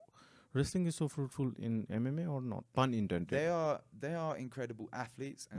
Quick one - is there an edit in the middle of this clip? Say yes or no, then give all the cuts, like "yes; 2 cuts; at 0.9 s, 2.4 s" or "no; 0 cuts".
yes; 1 cut; at 2.6 s